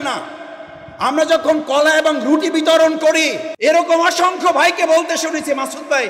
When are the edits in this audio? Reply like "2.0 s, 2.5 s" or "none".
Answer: 3.5 s